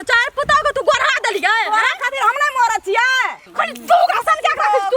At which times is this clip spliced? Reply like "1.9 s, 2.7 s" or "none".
3.4 s